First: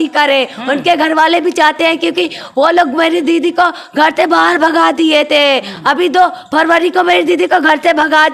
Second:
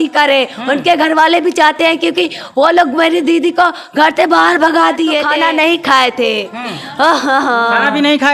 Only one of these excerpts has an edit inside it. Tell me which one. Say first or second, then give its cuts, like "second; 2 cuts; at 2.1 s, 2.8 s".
second; 1 cut; at 5.3 s